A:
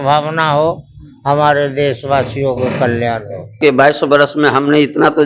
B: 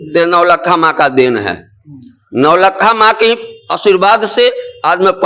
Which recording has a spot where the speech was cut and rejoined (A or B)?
A